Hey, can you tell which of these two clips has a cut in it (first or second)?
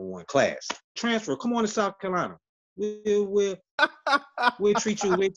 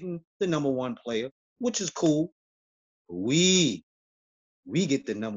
first